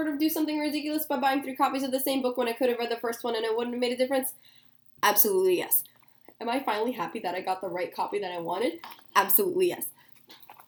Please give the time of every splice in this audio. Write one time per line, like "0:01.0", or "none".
none